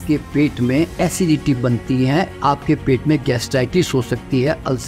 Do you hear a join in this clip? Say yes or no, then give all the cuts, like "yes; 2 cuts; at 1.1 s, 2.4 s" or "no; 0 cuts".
yes; 1 cut; at 0.9 s